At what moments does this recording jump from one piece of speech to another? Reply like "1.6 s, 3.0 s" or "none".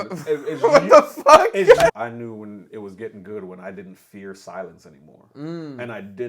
2.0 s